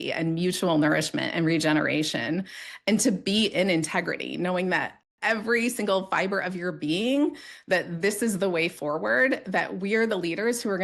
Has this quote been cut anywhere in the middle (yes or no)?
no